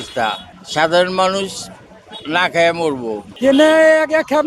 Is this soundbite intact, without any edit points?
no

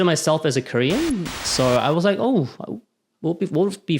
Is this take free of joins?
no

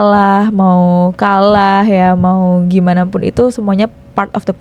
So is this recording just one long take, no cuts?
yes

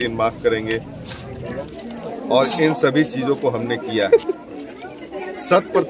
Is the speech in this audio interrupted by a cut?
no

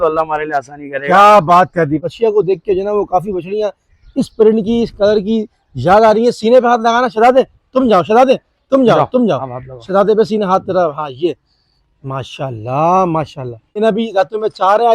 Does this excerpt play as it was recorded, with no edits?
no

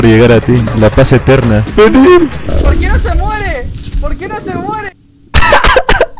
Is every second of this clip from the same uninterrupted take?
no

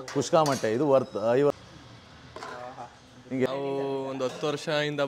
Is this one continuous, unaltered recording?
no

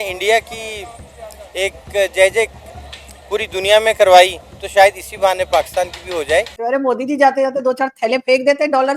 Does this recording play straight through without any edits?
no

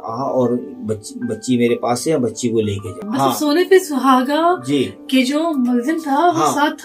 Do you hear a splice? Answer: yes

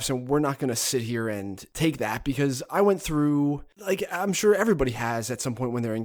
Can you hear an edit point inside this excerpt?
yes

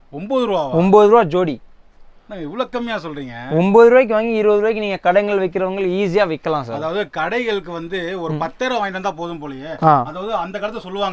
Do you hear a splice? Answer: no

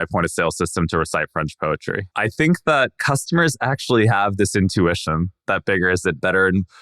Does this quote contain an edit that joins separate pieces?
yes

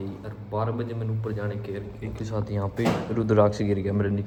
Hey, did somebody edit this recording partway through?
no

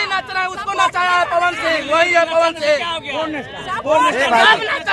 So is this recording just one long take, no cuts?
yes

